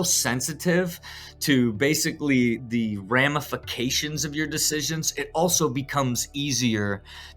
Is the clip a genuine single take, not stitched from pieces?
no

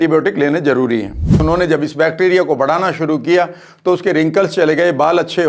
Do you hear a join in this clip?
yes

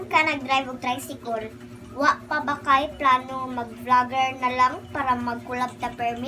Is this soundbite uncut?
yes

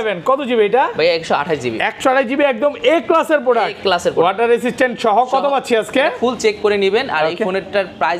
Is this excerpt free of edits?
yes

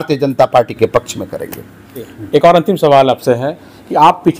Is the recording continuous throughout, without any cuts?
yes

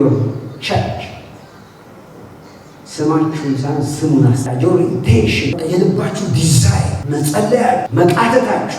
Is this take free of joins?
no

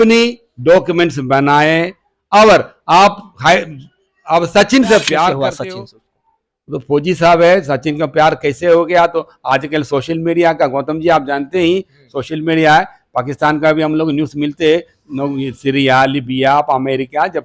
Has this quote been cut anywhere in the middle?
yes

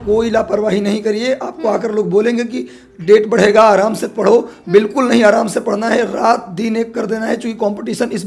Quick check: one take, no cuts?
yes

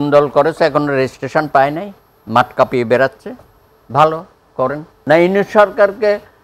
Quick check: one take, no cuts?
no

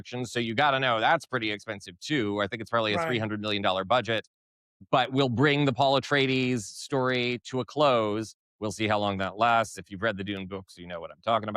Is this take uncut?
yes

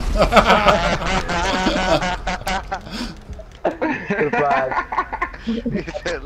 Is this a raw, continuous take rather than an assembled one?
yes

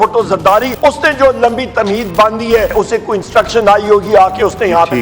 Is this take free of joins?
no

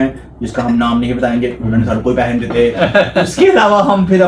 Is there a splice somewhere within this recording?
no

